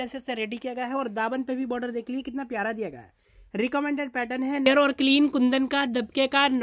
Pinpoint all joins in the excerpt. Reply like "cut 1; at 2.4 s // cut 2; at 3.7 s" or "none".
cut 1; at 4.7 s